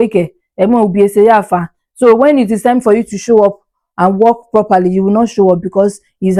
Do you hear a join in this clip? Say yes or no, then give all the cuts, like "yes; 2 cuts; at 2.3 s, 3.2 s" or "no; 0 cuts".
no; 0 cuts